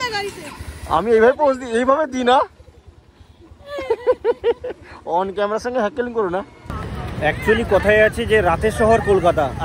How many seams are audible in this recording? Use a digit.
1